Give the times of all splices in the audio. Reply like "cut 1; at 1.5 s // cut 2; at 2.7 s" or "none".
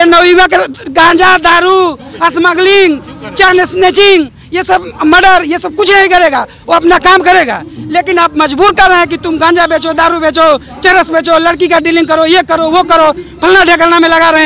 none

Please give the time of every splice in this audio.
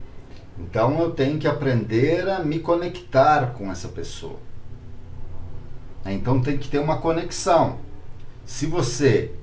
none

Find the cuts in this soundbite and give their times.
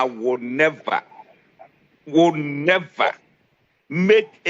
none

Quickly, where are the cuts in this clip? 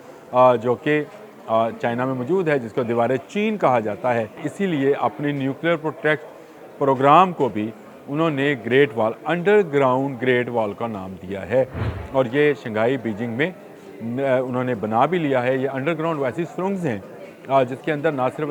cut 1; at 4.5 s

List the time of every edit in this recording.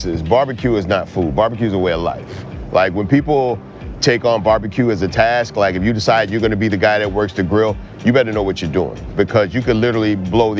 none

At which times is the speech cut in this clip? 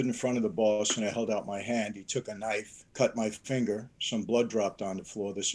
cut 1; at 2.8 s

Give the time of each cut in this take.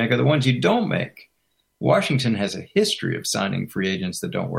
none

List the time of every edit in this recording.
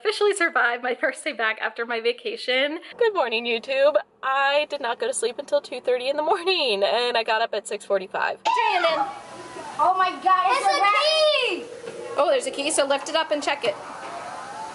cut 1; at 2.9 s // cut 2; at 8.4 s

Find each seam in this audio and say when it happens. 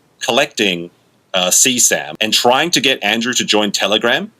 cut 1; at 2.1 s

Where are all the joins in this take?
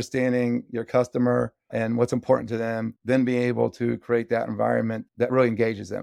cut 1; at 1.6 s // cut 2; at 3.0 s

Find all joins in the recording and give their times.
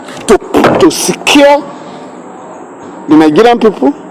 none

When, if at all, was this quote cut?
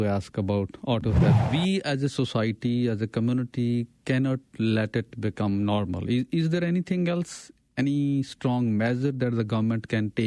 cut 1; at 1.4 s

